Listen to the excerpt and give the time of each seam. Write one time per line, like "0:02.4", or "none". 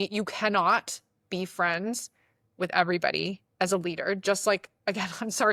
none